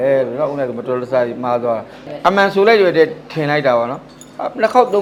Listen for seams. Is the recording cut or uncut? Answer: uncut